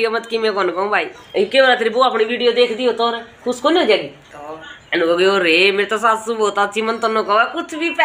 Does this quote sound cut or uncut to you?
cut